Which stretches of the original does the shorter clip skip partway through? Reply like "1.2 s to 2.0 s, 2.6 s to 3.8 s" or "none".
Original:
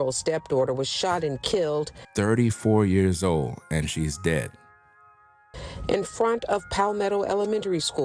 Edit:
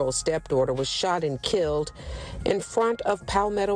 2.0 s to 5.4 s

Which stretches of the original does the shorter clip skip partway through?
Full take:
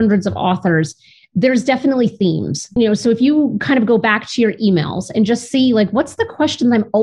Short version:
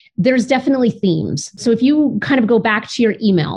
2.7 s to 3.0 s

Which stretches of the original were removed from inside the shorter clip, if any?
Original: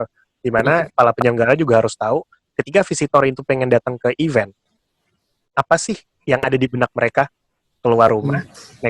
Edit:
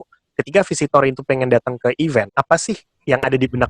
4.5 s to 5.5 s

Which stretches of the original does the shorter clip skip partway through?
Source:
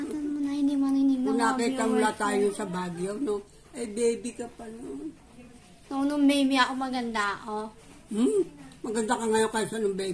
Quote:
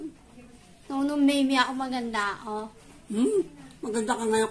none

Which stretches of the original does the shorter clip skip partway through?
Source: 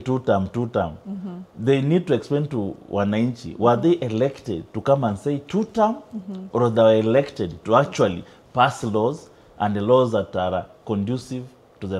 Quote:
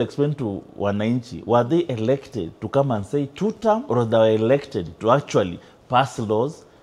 6.0 s to 6.5 s

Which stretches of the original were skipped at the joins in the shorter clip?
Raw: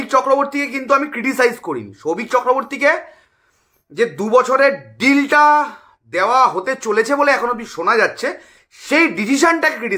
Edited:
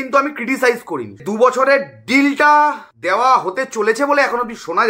2.0 s to 4.1 s, 5.8 s to 6.0 s

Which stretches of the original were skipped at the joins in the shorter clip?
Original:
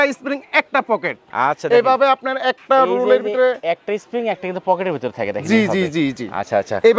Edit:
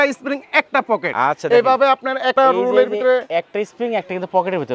1.1 s to 1.3 s, 2.5 s to 2.6 s

